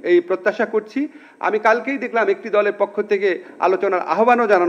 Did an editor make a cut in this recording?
no; 0 cuts

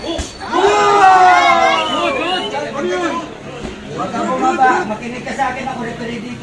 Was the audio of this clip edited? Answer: no; 0 cuts

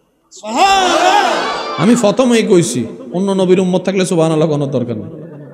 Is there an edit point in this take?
no; 0 cuts

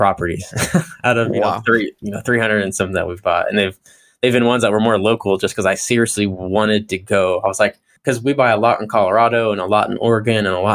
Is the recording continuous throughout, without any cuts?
no; 1 cut; at 7.9 s

